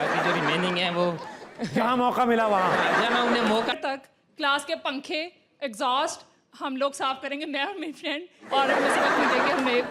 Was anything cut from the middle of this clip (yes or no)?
yes